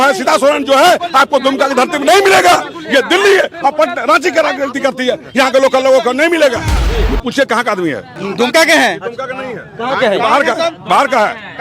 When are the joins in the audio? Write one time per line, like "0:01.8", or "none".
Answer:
0:06.9
0:08.1